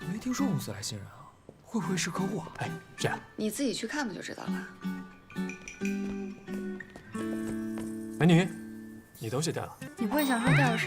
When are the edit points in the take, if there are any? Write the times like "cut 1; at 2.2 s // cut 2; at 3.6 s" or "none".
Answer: cut 1; at 9.8 s